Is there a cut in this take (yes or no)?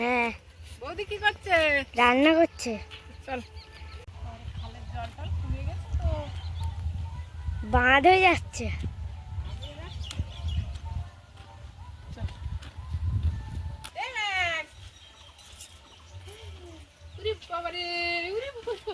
no